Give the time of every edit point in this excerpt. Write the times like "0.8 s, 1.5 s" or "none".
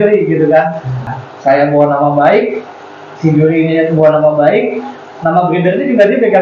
1.1 s